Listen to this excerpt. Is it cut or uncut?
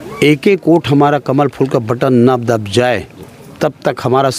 uncut